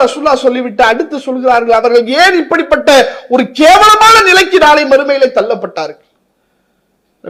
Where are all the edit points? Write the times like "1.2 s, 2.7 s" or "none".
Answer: none